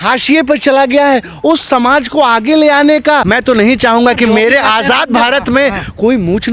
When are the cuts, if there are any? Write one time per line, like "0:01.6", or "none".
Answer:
0:03.3